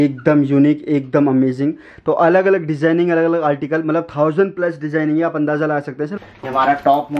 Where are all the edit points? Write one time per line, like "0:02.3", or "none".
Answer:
0:06.2